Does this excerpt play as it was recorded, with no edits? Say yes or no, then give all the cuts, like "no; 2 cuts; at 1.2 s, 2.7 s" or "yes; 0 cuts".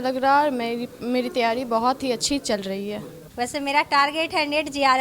no; 1 cut; at 3.2 s